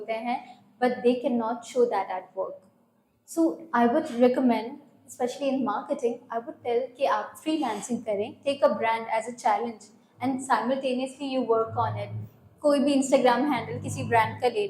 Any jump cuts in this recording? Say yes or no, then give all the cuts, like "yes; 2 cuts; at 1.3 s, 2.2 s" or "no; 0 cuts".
no; 0 cuts